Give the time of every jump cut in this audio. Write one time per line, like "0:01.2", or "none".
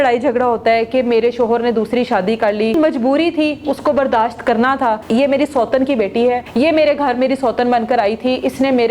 0:02.7
0:05.0
0:06.5